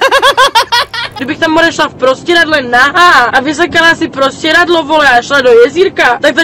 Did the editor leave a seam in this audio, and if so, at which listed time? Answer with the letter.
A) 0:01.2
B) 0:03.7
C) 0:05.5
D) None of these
A